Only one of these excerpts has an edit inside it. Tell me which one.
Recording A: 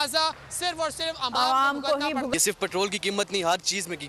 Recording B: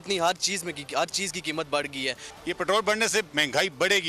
A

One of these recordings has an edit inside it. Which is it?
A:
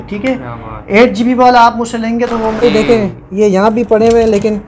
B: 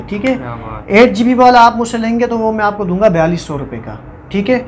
A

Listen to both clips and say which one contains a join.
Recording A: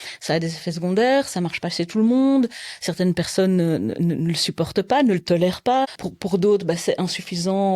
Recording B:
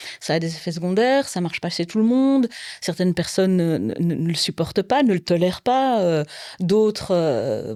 A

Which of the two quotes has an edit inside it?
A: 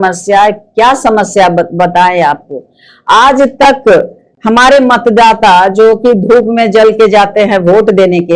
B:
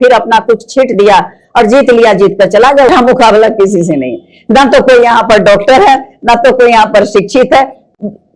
B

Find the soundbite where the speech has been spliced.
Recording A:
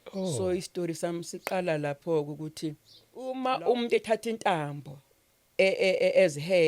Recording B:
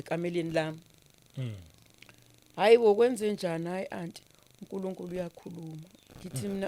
A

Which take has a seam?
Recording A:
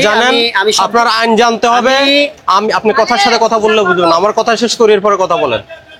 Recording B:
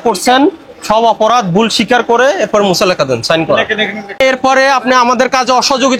B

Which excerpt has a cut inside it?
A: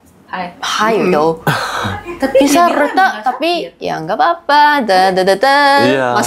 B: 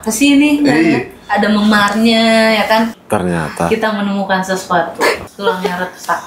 B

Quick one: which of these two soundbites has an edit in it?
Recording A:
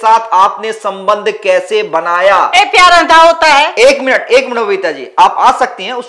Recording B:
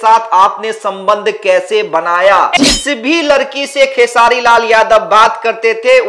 B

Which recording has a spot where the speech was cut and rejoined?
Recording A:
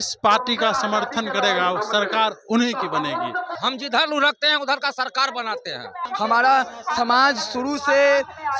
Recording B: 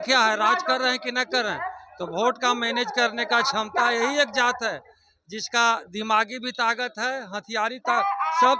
A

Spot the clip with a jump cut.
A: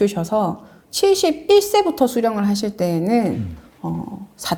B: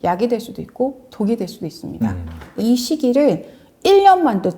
B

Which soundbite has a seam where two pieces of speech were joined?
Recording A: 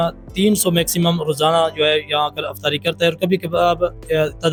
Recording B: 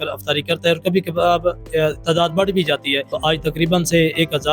B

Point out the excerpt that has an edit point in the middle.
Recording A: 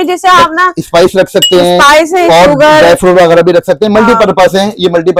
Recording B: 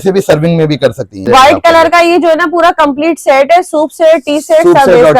B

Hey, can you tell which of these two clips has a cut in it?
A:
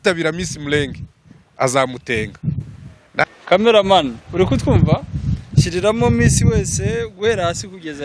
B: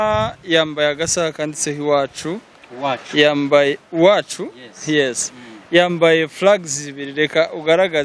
A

